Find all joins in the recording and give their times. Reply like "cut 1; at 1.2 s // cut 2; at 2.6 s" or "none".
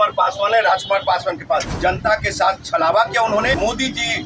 cut 1; at 1.7 s // cut 2; at 3.6 s